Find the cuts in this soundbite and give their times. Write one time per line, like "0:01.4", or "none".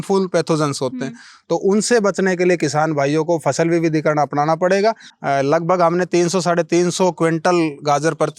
0:05.1